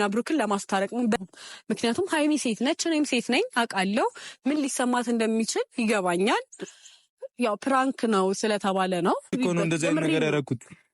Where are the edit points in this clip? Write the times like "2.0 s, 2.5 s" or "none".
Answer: 1.2 s, 9.3 s